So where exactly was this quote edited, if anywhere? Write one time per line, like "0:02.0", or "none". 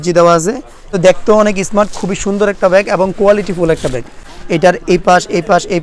0:00.9
0:04.1